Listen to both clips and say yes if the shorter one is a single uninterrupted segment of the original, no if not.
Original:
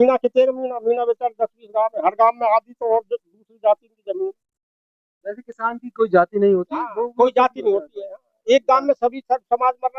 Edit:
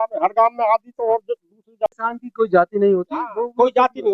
no